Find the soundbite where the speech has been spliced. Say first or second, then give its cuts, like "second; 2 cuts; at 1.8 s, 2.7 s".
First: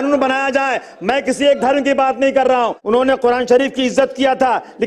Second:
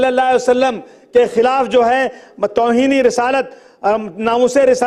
first; 1 cut; at 2.6 s